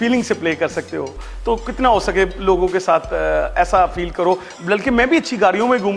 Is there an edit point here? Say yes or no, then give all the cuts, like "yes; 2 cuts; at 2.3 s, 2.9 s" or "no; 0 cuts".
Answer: no; 0 cuts